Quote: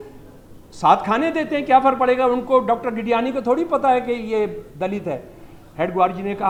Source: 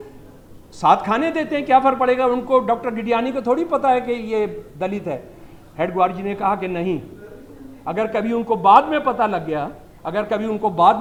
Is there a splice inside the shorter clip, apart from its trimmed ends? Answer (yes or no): no